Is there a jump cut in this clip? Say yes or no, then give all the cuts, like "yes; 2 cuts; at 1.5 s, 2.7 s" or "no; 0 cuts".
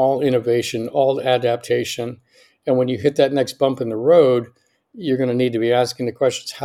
no; 0 cuts